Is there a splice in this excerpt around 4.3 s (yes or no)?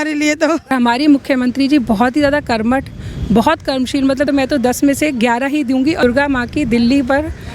yes